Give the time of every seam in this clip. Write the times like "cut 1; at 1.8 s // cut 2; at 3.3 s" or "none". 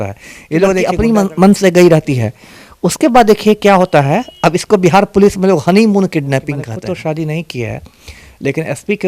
cut 1; at 0.9 s // cut 2; at 6.7 s